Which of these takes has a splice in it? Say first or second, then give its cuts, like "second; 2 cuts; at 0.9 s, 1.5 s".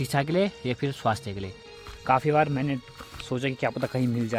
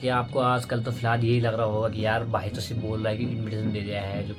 first; 1 cut; at 1.8 s